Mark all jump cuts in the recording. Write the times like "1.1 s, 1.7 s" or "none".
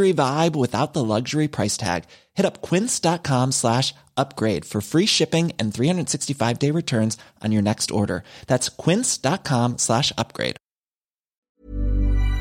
11.5 s